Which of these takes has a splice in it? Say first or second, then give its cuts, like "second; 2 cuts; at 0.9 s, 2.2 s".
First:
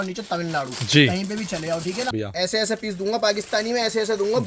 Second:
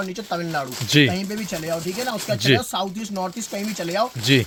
first; 1 cut; at 2.1 s